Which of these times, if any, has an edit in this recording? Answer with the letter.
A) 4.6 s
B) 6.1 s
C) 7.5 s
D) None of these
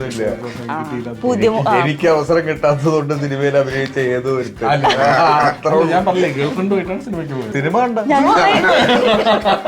C